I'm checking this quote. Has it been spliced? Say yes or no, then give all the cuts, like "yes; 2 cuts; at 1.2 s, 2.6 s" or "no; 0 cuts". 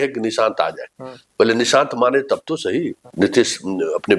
yes; 1 cut; at 3.0 s